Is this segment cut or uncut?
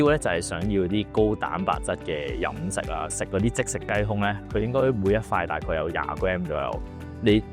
cut